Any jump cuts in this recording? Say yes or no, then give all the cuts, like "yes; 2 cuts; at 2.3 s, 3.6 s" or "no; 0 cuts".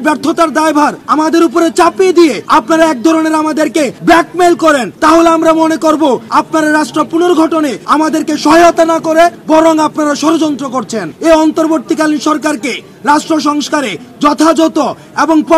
yes; 8 cuts; at 1.0 s, 2.4 s, 3.9 s, 4.9 s, 6.2 s, 7.8 s, 9.4 s, 11.1 s